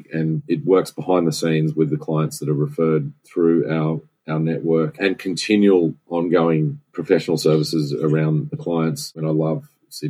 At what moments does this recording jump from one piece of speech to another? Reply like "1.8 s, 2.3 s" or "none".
9.1 s